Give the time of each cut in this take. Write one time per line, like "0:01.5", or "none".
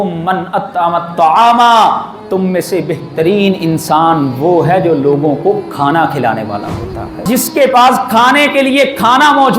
0:07.3